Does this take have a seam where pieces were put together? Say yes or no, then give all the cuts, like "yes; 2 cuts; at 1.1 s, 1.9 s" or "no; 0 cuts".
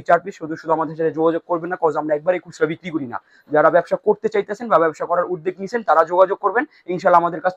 no; 0 cuts